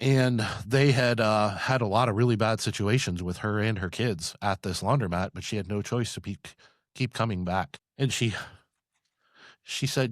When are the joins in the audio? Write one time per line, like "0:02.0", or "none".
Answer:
0:07.8